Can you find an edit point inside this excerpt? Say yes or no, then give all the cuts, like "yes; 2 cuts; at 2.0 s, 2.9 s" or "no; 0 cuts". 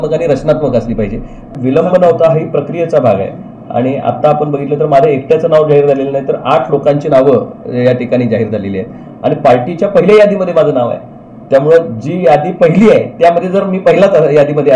yes; 1 cut; at 1.5 s